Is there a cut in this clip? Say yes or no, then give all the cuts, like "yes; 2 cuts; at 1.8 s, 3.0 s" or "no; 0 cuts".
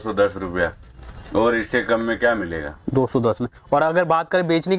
no; 0 cuts